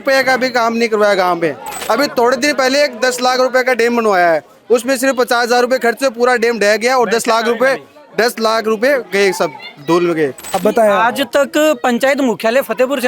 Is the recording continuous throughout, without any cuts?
no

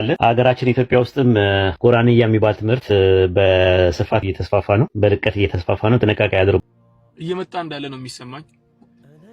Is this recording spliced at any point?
yes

